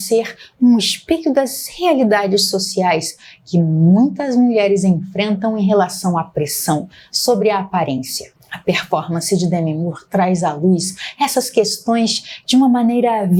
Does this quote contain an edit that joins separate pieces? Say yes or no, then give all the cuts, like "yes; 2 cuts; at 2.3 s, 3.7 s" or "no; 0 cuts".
no; 0 cuts